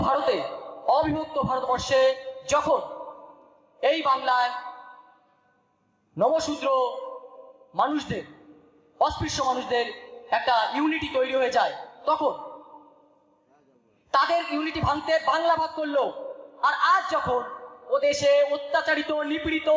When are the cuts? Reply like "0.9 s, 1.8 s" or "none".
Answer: none